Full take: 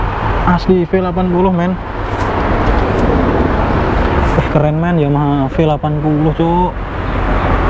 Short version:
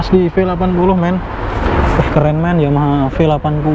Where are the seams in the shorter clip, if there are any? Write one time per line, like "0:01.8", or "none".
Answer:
0:01.6